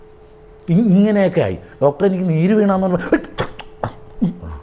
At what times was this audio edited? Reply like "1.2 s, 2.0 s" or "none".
1.6 s

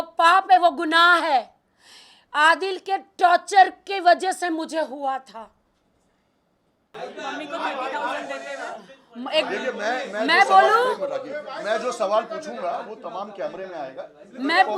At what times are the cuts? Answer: 6.9 s

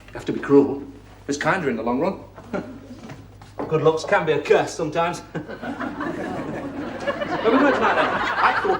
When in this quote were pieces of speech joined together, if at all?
3.7 s

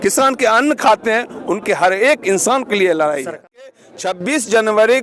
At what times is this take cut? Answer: 3.7 s

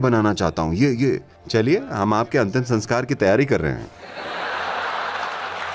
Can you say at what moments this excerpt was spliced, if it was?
none

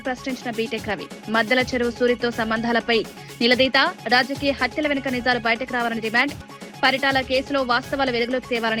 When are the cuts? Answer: none

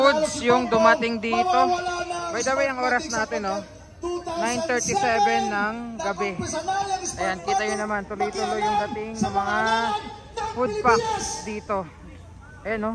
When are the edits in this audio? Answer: none

